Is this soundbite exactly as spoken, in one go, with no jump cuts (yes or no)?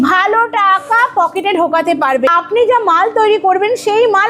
no